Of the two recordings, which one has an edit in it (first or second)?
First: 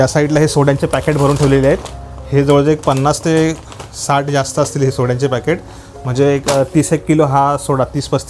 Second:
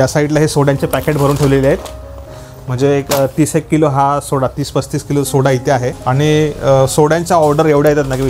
second